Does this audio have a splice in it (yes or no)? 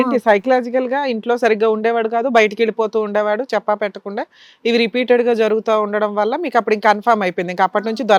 no